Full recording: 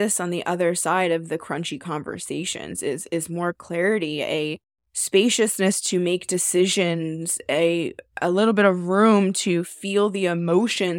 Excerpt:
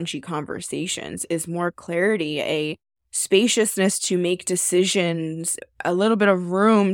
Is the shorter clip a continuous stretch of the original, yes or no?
no